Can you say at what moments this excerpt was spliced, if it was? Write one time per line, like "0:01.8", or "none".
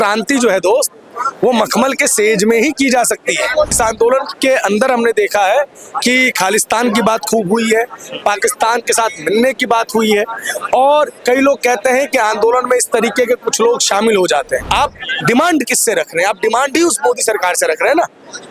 0:03.7
0:14.7